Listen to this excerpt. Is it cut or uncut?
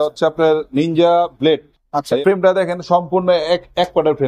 cut